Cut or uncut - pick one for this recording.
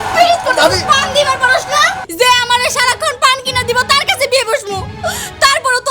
cut